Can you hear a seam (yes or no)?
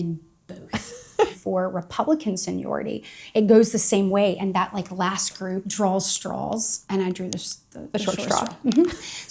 yes